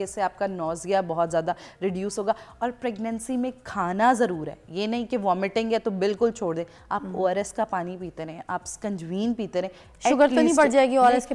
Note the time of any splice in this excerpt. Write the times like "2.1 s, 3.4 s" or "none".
none